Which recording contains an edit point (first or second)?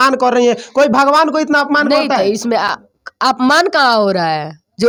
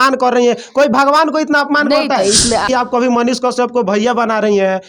second